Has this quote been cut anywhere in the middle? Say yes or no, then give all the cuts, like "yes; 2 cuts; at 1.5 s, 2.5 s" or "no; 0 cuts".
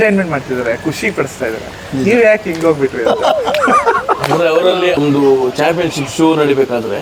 yes; 1 cut; at 5.0 s